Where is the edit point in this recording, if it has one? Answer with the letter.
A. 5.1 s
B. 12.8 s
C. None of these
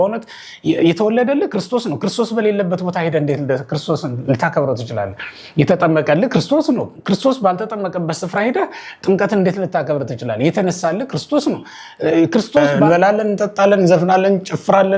B